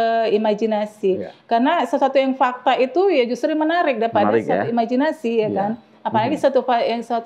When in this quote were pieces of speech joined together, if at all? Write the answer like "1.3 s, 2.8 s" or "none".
none